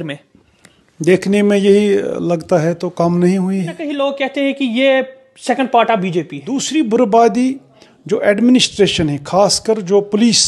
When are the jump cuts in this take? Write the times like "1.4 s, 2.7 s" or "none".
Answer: 3.9 s, 6.7 s